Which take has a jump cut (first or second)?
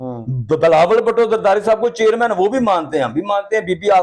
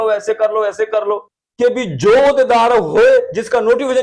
second